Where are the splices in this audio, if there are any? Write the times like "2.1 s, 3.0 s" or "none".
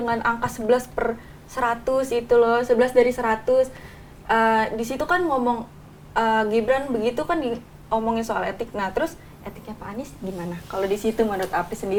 none